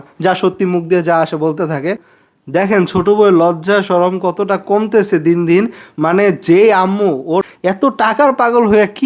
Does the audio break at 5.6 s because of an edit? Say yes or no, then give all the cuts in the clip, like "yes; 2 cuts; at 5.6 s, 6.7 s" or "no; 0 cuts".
no; 2 cuts; at 2.1 s, 7.5 s